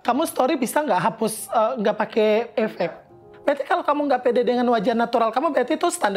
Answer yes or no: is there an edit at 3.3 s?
yes